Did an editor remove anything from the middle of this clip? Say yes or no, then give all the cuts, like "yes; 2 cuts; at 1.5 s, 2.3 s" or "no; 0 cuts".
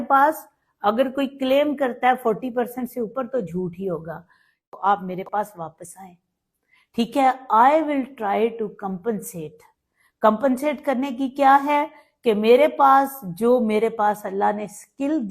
yes; 1 cut; at 4.6 s